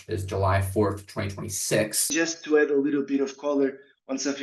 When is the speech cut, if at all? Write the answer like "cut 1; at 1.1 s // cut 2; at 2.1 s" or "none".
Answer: cut 1; at 2.1 s